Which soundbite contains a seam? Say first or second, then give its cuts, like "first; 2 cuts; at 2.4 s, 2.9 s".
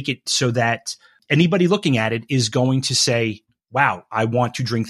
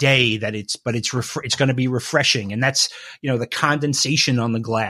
first; 1 cut; at 1.2 s